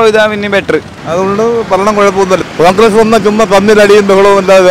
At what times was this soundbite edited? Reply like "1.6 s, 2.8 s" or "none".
1.0 s, 2.4 s